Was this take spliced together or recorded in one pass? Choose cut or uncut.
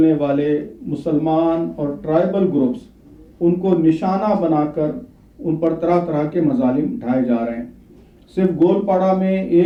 uncut